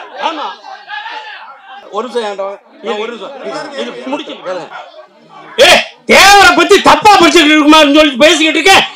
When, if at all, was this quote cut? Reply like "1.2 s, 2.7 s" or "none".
1.9 s, 4.7 s